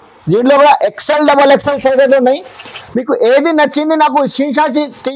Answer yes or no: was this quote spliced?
no